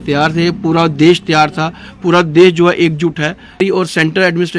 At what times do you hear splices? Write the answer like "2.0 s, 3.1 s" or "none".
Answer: 3.6 s